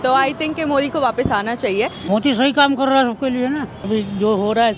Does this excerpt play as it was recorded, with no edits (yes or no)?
no